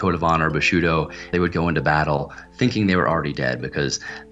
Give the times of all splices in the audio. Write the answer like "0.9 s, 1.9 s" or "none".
1.3 s